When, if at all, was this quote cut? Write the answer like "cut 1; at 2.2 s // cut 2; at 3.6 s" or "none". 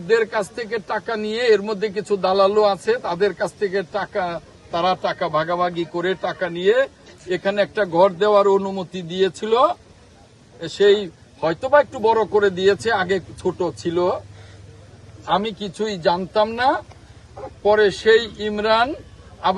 none